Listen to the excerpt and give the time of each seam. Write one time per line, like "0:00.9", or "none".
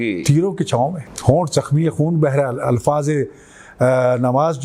0:01.1